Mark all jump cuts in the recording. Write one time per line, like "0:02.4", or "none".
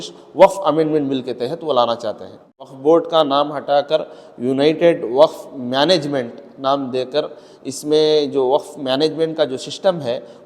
0:02.7

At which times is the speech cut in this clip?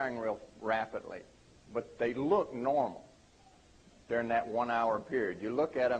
0:04.0

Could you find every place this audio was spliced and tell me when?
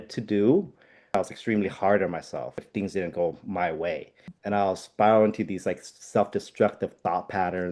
0:01.2
0:02.6
0:04.3

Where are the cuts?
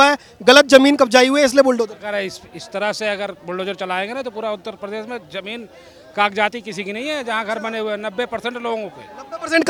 none

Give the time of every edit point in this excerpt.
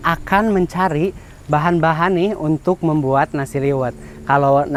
none

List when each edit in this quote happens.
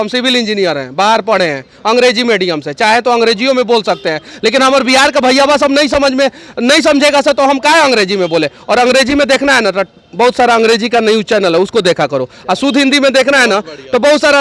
none

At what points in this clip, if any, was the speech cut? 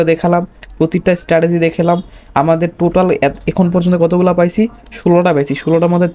none

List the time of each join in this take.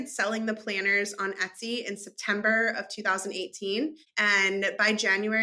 0:04.1

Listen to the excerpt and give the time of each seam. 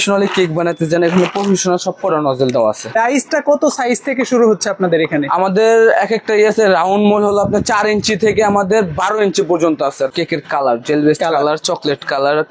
0:02.9
0:10.1

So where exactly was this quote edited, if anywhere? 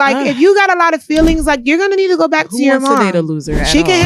none

